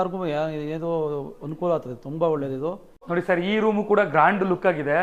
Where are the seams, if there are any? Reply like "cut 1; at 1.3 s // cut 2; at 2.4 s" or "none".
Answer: cut 1; at 2.9 s